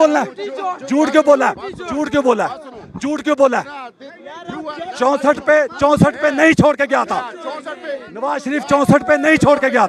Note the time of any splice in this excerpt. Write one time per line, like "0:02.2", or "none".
none